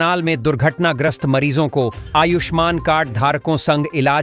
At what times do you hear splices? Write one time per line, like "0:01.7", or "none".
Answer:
none